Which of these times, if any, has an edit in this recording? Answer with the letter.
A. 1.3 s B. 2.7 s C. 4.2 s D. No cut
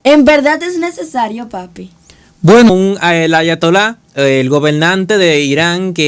B